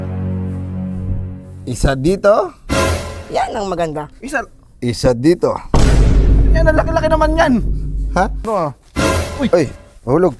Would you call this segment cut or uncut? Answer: cut